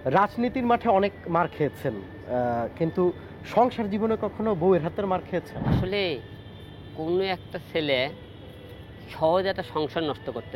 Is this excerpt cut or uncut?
cut